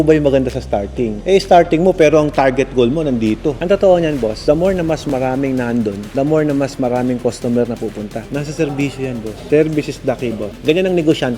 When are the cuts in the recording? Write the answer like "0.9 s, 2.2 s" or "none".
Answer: 3.6 s, 8.2 s, 10.5 s